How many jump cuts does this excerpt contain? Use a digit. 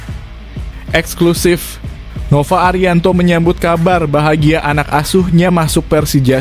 1